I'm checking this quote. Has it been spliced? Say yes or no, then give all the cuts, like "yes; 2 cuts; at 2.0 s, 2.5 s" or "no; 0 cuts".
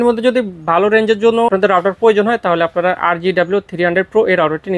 yes; 1 cut; at 1.5 s